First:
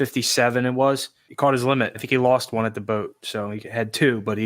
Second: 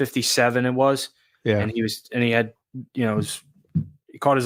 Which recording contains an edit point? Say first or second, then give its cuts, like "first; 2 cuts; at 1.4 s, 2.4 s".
first; 1 cut; at 1.2 s